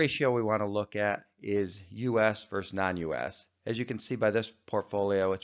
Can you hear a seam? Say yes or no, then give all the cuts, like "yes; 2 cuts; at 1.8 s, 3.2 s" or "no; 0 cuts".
no; 0 cuts